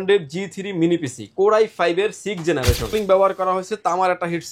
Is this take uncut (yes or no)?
no